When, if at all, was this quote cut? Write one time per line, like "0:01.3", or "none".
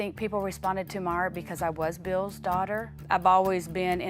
0:02.8